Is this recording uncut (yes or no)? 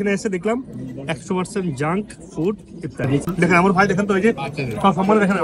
no